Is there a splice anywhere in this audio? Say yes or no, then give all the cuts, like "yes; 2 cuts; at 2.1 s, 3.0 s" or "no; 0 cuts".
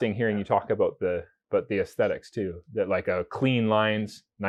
no; 0 cuts